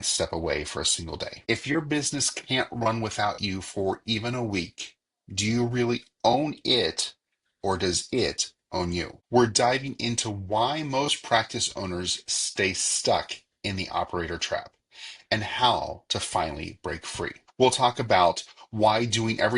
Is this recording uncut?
no; 3 cuts; at 1.3 s, 9.1 s, 17.4 s

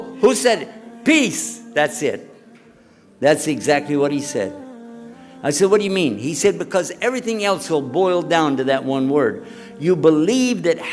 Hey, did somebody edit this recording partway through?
no; 0 cuts

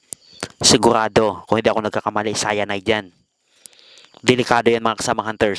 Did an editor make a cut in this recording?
no; 0 cuts

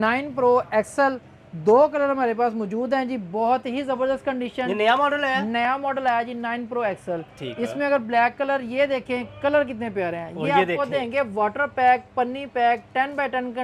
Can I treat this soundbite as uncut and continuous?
yes; 0 cuts

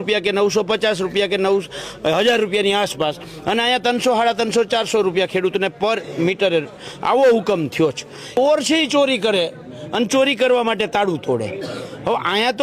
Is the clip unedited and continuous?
no; 1 cut; at 8.3 s

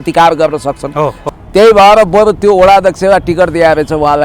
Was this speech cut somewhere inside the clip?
yes; 1 cut; at 1.3 s

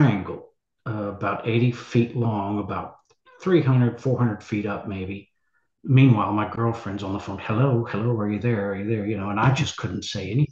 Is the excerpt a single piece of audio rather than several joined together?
no; 1 cut; at 5.7 s

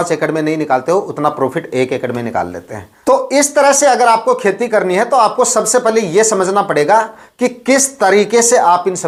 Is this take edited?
no; 0 cuts

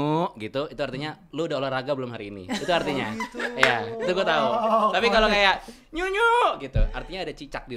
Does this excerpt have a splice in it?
no; 0 cuts

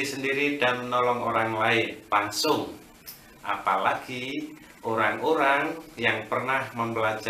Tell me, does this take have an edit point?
yes; 1 cut; at 2.0 s

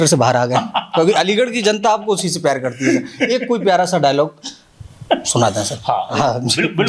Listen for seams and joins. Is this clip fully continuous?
yes; 0 cuts

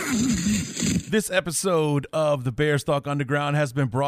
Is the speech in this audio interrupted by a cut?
yes; 1 cut; at 1.0 s

